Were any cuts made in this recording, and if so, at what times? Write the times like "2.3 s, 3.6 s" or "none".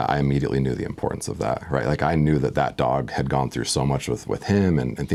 none